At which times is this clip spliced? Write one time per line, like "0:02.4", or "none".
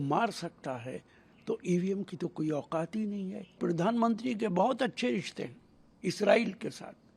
0:03.6